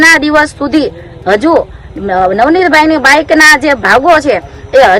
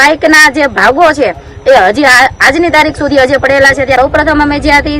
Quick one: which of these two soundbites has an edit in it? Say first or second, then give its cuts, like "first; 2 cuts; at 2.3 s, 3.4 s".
second; 1 cut; at 4.0 s